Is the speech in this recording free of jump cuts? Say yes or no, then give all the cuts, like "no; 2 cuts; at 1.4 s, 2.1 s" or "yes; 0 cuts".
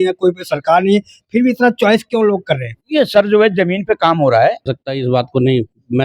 no; 1 cut; at 4.8 s